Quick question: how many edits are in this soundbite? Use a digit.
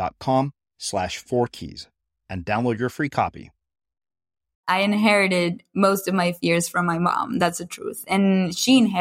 1